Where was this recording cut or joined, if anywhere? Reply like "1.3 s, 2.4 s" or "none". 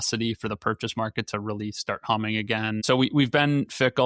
2.8 s